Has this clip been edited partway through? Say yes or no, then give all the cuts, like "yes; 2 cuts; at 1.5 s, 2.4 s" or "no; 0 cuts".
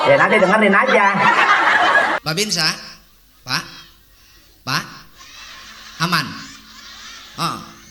yes; 1 cut; at 2.2 s